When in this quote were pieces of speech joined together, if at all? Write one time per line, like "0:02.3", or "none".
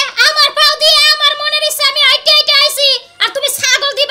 none